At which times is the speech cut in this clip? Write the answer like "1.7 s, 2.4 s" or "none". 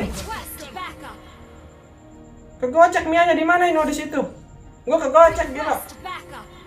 none